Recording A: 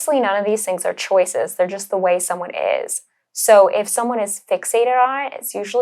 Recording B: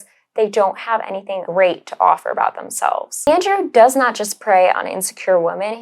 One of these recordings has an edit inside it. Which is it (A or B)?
B